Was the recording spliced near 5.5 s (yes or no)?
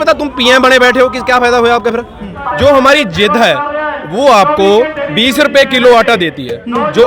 no